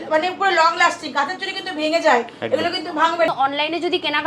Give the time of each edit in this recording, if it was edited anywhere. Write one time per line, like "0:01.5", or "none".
0:03.3